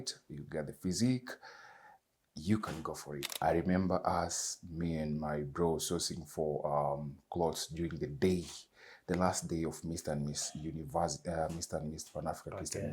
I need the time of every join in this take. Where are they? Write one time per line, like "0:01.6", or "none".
0:03.3